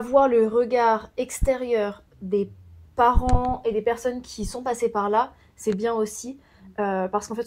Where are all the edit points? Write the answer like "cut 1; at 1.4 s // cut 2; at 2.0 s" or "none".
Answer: none